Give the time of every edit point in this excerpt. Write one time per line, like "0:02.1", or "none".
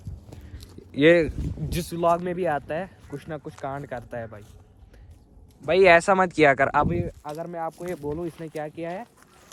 none